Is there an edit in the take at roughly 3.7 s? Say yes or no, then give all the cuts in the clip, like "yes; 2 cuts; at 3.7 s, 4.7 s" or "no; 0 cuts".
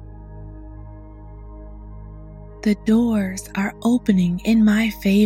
no; 1 cut; at 2.4 s